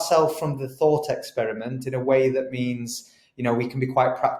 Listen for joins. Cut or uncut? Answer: uncut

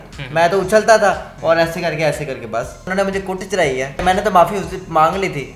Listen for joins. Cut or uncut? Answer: cut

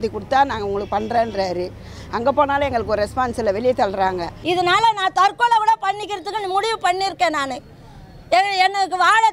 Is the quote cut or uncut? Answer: cut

